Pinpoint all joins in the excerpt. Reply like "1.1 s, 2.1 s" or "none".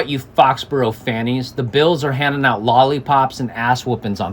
none